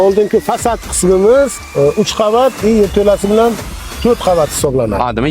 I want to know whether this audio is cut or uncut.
cut